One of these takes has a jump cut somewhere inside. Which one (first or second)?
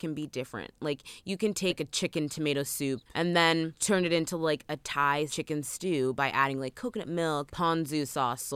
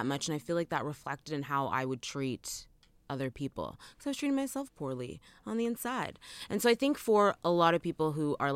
first